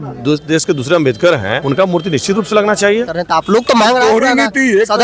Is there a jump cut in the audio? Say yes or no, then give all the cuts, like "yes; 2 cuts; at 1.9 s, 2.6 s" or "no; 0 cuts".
yes; 2 cuts; at 1.5 s, 3.1 s